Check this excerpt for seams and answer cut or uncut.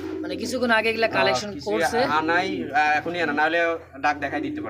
uncut